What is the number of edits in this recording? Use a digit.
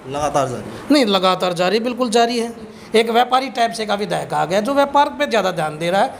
1